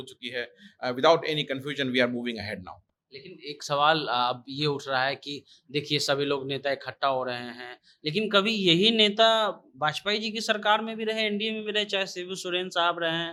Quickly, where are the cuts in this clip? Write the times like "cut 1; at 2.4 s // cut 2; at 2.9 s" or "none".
none